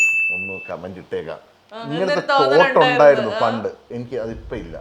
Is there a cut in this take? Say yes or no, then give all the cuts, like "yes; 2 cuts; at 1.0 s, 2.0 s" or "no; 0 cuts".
yes; 1 cut; at 3.9 s